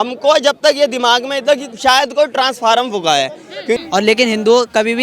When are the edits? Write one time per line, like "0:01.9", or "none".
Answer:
0:03.8